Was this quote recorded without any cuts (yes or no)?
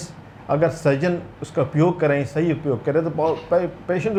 yes